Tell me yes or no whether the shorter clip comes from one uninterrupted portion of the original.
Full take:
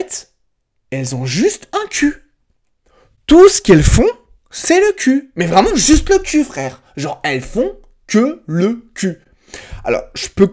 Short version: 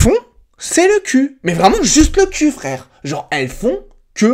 yes